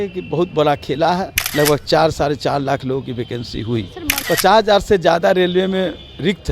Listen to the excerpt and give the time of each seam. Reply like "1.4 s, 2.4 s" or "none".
1.4 s, 4.2 s